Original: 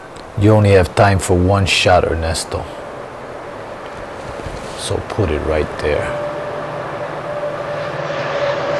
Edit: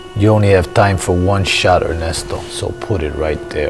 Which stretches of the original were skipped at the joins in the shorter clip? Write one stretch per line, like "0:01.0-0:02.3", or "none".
0:02.7-0:04.8

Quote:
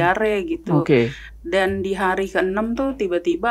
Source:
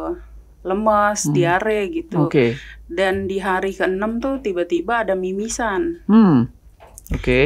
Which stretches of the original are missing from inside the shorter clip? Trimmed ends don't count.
none

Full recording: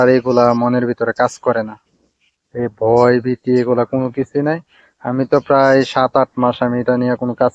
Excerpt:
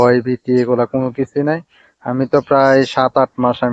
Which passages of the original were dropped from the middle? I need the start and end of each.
none

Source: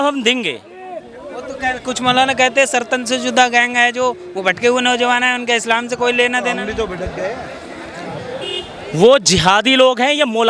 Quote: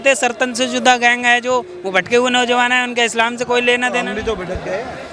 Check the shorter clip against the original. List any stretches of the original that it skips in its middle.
none

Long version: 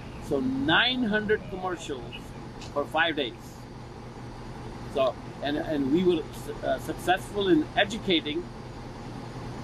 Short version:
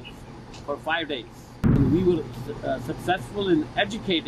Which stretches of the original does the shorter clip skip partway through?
0:03.8-0:05.8

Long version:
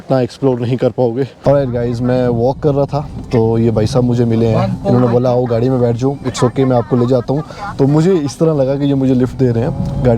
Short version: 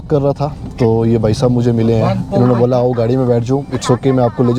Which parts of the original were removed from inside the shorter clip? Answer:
none

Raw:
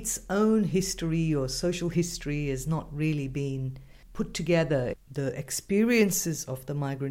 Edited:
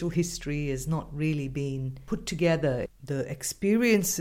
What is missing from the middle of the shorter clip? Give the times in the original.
0:03.7-0:04.0

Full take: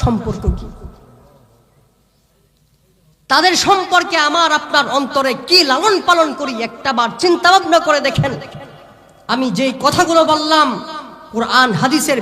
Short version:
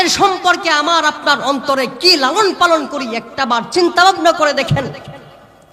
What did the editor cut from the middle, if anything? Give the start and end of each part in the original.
none

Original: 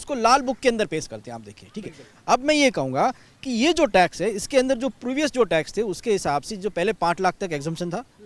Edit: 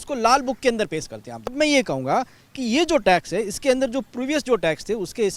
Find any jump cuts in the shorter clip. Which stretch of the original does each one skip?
0:01.5-0:02.4

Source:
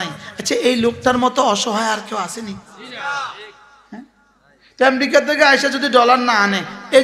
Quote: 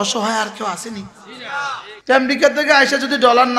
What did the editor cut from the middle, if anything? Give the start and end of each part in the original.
0:03.4-0:04.6

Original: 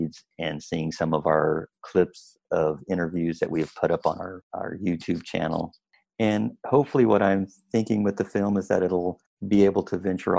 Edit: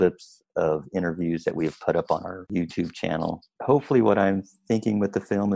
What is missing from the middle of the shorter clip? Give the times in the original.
0:04.4-0:04.7
0:05.9-0:06.6

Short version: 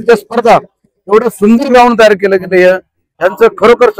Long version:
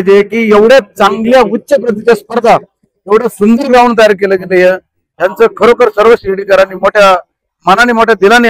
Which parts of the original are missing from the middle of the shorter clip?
none

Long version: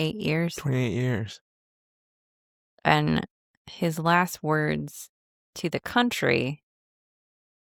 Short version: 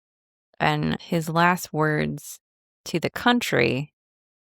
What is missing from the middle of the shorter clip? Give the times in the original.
0:03.3-0:03.7

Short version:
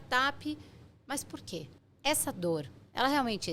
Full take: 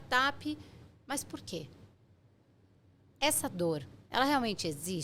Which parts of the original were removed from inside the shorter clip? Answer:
0:01.8-0:03.0

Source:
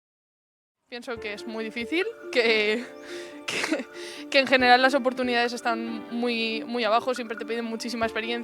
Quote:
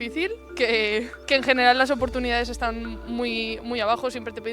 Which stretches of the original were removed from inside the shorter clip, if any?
0:02.9-0:04.2

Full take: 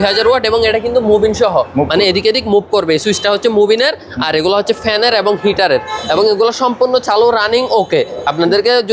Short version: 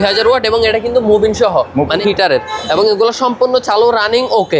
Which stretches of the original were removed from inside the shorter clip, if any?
0:02.0-0:05.4

